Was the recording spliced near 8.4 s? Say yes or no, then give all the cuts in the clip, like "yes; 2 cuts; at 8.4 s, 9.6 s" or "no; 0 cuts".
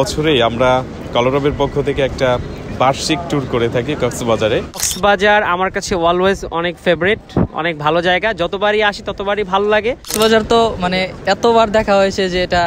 no; 2 cuts; at 4.9 s, 10.1 s